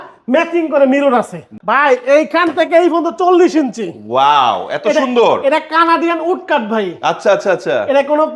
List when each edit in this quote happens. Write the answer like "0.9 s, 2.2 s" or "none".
1.5 s